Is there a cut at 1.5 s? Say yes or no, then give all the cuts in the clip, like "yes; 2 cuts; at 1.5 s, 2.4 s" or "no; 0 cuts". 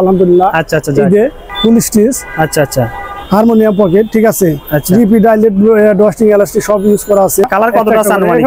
yes; 2 cuts; at 1.5 s, 7.5 s